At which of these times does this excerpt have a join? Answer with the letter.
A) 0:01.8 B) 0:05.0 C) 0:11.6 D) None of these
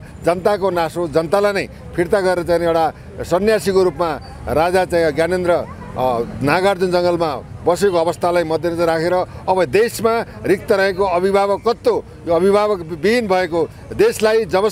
D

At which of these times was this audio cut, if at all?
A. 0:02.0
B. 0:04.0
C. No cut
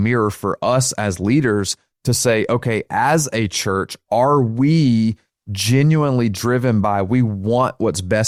C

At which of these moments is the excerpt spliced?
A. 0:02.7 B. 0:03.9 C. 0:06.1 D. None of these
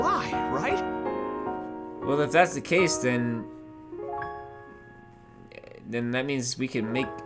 D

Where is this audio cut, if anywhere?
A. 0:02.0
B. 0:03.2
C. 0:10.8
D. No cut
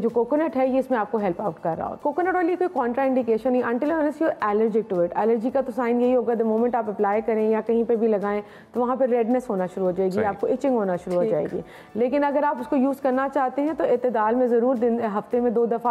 A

